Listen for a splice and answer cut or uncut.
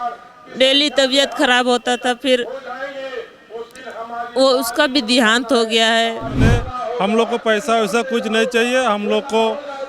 cut